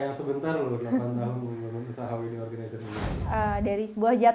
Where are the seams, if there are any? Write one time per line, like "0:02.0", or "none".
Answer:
0:03.2